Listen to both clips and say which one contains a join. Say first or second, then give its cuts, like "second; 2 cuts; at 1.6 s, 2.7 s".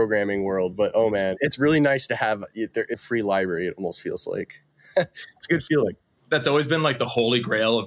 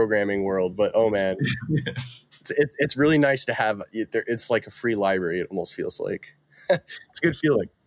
first; 2 cuts; at 1.4 s, 3.0 s